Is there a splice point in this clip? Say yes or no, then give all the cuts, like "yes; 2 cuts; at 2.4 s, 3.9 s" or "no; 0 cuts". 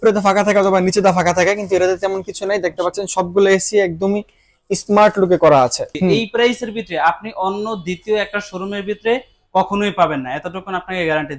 yes; 1 cut; at 5.9 s